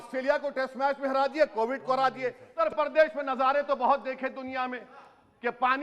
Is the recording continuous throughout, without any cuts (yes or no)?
no